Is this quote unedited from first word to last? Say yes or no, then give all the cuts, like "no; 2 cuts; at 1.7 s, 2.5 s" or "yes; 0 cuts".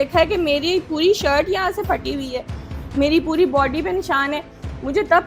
yes; 0 cuts